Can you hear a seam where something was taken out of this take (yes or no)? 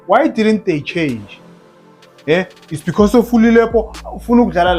no